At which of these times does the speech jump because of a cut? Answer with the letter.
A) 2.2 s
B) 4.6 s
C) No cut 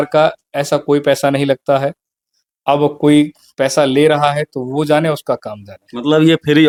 C